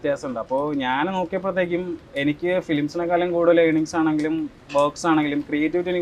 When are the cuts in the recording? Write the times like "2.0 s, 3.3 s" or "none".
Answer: none